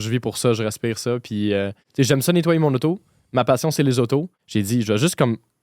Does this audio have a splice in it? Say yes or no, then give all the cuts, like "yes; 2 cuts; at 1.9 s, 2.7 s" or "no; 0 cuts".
yes; 2 cuts; at 1.8 s, 4.4 s